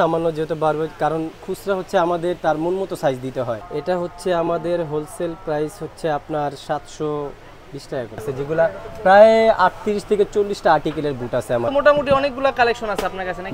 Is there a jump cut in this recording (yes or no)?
yes